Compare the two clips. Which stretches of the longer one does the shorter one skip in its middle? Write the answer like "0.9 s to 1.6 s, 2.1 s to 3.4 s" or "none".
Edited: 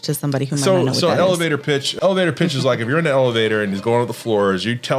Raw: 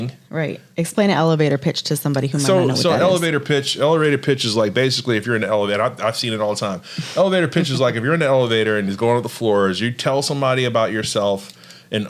3.7 s to 7.0 s